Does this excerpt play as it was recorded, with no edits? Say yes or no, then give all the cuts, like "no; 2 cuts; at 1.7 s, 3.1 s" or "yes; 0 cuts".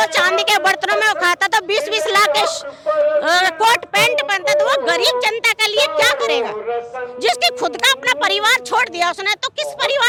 yes; 0 cuts